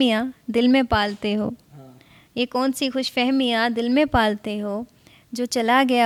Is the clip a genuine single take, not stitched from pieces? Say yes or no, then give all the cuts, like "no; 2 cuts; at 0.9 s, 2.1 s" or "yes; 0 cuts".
yes; 0 cuts